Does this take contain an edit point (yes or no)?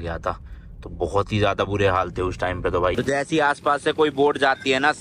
yes